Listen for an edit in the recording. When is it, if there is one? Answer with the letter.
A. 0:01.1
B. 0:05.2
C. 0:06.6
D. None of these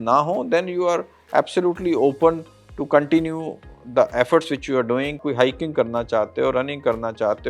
B